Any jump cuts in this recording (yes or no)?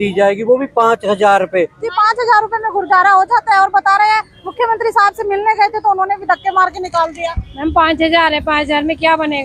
yes